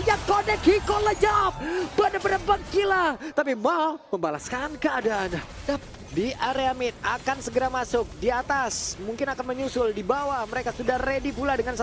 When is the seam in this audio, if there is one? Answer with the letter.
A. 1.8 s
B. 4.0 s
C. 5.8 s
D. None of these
C